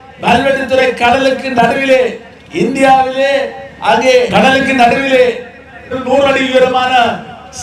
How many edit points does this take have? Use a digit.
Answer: 2